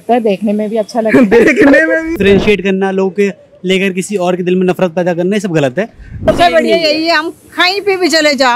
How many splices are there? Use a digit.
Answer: 2